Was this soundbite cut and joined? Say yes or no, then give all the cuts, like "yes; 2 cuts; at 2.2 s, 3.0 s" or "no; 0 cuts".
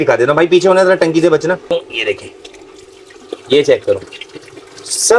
yes; 1 cut; at 1.7 s